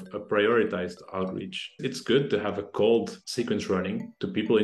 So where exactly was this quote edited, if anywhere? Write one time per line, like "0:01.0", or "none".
0:01.8
0:03.2